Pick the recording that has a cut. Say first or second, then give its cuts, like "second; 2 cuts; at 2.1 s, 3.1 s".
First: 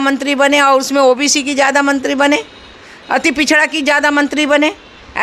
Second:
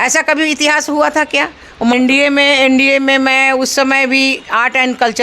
second; 1 cut; at 1.9 s